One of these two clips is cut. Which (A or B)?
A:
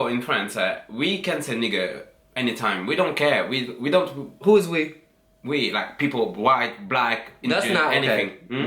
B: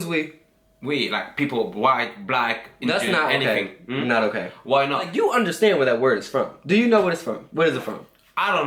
B